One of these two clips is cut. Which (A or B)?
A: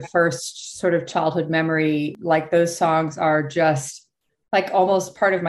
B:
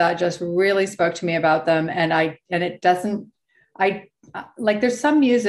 A